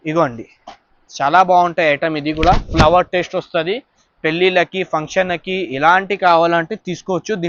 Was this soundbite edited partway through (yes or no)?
no